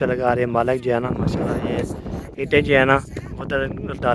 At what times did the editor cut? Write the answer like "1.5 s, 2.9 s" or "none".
1.1 s